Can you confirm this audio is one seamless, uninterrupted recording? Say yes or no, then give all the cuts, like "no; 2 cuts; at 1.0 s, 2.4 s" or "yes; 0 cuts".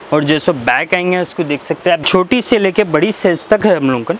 no; 1 cut; at 2.0 s